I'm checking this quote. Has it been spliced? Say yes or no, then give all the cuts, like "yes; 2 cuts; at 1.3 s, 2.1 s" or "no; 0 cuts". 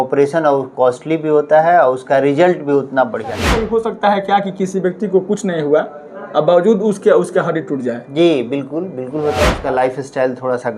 yes; 2 cuts; at 3.5 s, 9.6 s